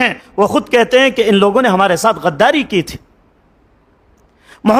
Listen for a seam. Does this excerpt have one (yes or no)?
no